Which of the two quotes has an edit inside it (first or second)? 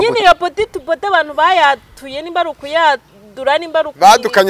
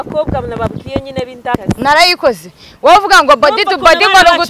second